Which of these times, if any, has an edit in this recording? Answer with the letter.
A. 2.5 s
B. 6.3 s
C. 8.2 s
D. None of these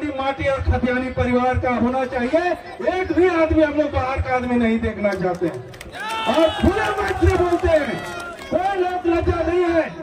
D